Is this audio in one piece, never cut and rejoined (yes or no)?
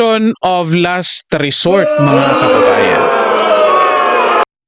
yes